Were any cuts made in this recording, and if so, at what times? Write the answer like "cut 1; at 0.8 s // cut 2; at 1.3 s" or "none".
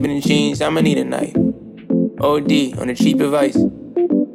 none